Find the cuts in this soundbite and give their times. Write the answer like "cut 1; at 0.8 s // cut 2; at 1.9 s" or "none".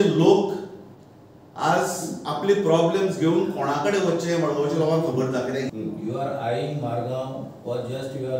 cut 1; at 5.7 s